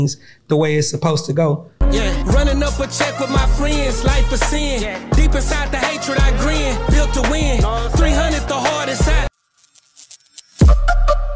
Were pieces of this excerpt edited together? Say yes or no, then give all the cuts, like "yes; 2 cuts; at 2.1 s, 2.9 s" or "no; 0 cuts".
yes; 1 cut; at 9.3 s